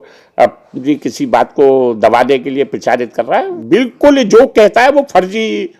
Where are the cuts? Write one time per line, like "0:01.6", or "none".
0:03.6